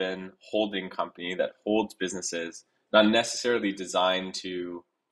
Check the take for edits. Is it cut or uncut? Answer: uncut